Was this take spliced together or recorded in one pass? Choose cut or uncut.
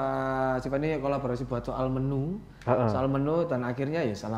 uncut